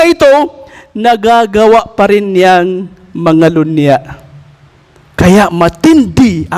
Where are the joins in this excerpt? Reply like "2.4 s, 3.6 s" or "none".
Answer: none